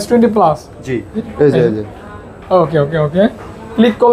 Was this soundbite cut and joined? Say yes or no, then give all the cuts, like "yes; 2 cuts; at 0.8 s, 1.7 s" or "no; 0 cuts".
yes; 1 cut; at 1.2 s